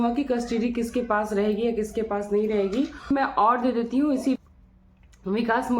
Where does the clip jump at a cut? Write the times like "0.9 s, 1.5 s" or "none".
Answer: 3.0 s, 4.4 s